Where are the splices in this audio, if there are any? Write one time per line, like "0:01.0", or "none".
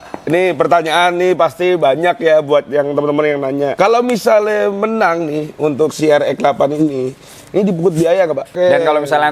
0:03.7
0:08.5